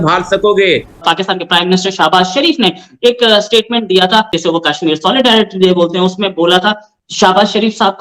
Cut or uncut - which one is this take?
cut